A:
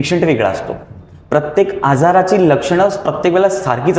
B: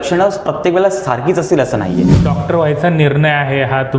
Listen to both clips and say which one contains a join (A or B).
B